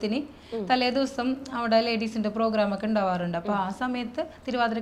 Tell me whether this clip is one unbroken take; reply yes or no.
yes